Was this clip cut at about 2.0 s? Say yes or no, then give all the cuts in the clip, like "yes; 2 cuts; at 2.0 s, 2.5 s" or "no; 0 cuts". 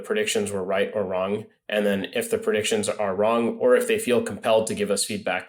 no; 0 cuts